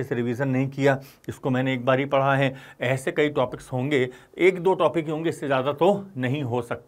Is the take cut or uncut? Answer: uncut